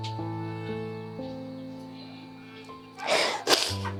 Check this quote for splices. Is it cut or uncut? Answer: uncut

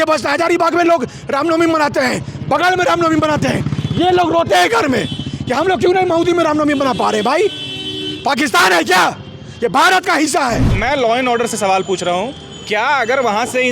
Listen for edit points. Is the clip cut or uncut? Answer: cut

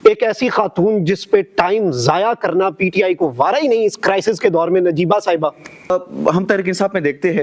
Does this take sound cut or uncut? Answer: cut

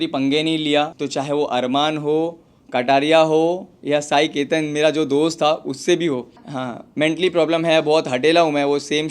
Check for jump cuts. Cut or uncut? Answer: cut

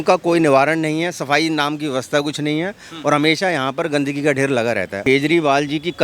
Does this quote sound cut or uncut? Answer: cut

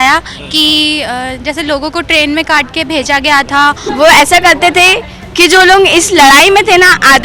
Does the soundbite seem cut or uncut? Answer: cut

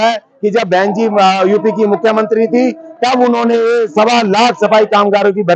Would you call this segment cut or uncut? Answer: uncut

